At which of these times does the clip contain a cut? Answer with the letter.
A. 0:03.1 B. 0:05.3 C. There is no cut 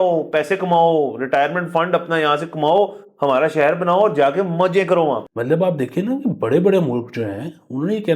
B